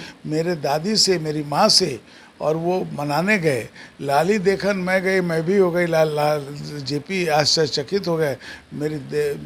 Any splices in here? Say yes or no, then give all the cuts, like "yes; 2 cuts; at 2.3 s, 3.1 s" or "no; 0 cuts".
no; 0 cuts